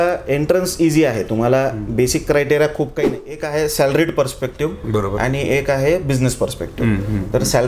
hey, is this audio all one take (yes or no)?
no